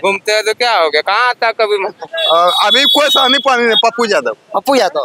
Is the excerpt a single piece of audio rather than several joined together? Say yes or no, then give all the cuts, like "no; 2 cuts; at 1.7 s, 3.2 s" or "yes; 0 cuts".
no; 1 cut; at 2.1 s